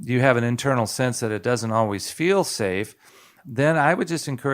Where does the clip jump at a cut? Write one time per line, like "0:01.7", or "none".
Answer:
0:03.4